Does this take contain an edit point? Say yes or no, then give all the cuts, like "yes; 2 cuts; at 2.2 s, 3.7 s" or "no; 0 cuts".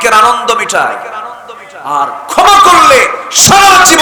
no; 0 cuts